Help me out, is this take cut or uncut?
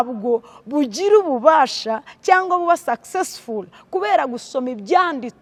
uncut